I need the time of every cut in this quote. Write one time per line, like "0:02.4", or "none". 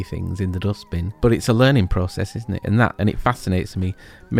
0:01.2
0:02.9